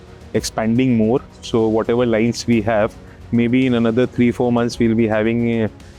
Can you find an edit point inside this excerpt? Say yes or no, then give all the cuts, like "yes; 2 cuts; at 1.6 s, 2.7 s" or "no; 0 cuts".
no; 0 cuts